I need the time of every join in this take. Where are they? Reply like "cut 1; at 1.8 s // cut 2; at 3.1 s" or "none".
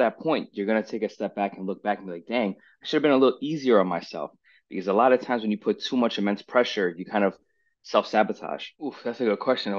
cut 1; at 8.6 s